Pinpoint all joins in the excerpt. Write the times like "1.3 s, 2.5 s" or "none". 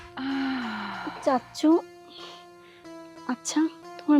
1.0 s